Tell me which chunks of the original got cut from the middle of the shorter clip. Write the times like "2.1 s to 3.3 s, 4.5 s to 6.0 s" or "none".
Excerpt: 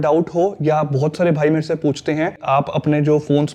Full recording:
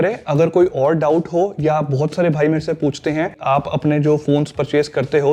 none